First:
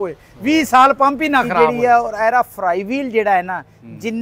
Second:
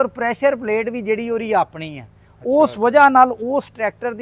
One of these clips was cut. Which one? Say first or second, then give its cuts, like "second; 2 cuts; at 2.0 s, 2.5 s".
first; 1 cut; at 1.5 s